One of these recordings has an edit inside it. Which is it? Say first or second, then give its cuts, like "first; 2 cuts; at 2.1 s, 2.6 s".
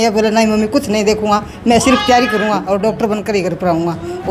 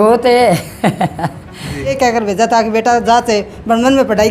second; 1 cut; at 1.9 s